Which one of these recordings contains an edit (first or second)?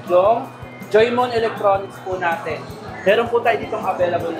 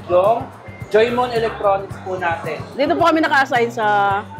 second